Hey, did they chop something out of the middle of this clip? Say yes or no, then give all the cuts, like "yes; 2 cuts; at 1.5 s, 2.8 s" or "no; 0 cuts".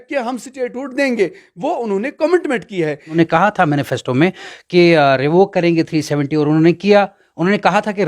yes; 1 cut; at 3.2 s